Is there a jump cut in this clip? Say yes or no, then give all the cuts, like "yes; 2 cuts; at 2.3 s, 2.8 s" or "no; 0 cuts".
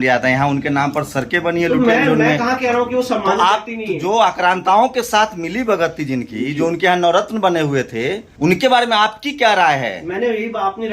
yes; 1 cut; at 8.3 s